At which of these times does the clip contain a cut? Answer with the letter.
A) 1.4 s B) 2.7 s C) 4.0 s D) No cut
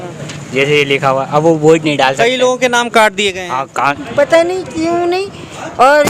C